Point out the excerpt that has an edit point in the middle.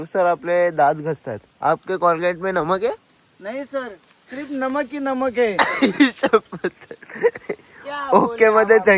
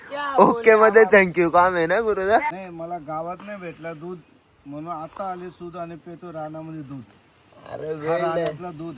second; 1 cut; at 2.5 s

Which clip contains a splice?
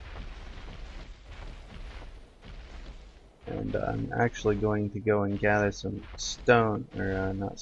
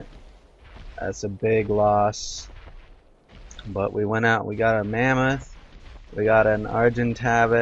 second; 1 cut; at 6.3 s

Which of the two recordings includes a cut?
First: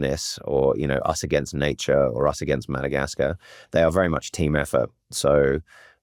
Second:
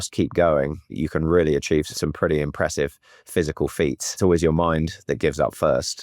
second; 3 cuts; at 0.9 s, 1.9 s, 4.2 s

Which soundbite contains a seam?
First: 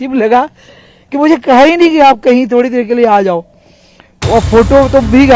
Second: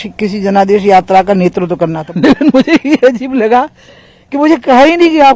second; 1 cut; at 2.0 s

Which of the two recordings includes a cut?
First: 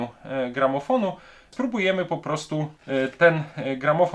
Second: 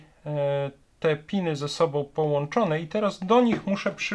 first; 2 cuts; at 1.5 s, 2.8 s

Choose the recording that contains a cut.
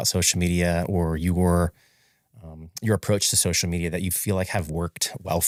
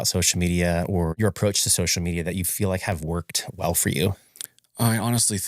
second; 1 cut; at 1.1 s

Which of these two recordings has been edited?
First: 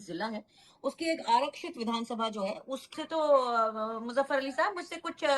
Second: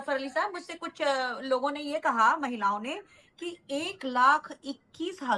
first; 1 cut; at 2.9 s

